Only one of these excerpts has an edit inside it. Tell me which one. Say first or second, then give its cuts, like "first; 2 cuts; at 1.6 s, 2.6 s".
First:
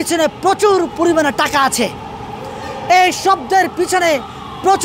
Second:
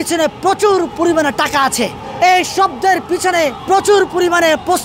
second; 2 cuts; at 2.0 s, 3.6 s